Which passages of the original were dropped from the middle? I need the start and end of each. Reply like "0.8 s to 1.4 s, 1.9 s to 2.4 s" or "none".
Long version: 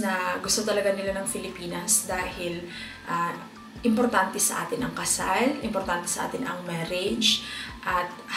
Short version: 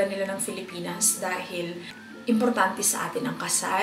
2.9 s to 3.6 s